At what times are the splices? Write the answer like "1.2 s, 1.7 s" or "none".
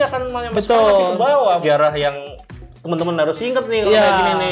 1.6 s